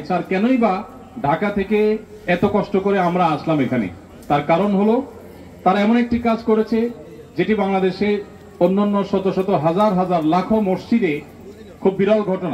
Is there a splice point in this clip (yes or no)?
no